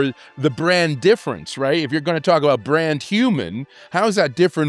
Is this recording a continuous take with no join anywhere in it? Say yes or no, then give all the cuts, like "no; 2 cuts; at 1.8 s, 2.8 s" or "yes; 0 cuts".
yes; 0 cuts